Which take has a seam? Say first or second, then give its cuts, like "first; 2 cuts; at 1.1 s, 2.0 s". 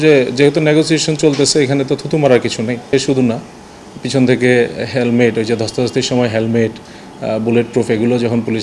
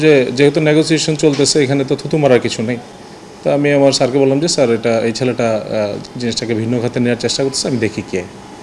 first; 1 cut; at 2.9 s